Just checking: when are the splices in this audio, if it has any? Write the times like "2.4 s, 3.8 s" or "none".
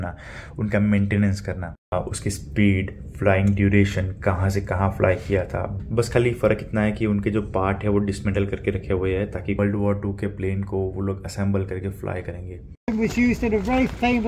1.9 s, 5.7 s, 9.6 s, 12.8 s